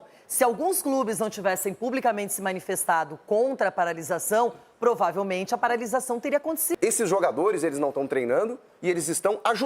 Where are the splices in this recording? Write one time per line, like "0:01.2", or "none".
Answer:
0:06.8